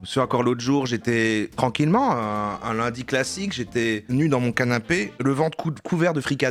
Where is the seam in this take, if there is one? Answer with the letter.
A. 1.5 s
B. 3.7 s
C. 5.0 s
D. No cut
D